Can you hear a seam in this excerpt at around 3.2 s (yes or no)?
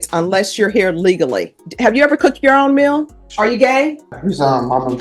yes